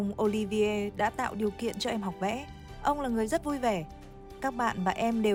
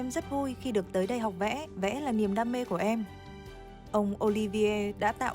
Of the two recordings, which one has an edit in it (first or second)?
second